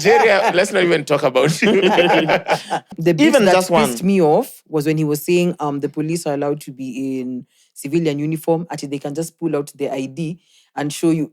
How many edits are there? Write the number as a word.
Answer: one